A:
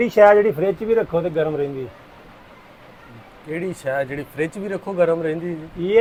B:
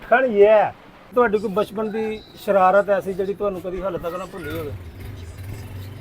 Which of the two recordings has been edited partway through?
B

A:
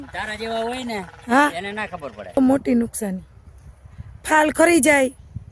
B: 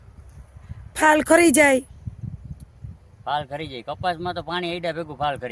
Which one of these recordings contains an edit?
A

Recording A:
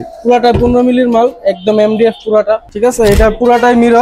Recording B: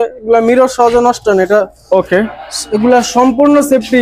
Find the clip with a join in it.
A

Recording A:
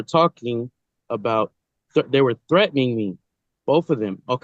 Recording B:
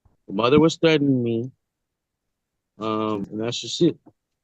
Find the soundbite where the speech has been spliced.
B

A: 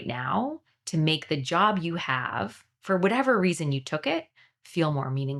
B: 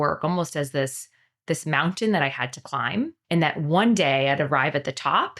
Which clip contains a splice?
B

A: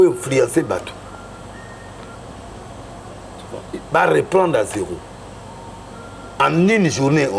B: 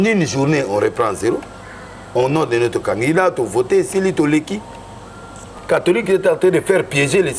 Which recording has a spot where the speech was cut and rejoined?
B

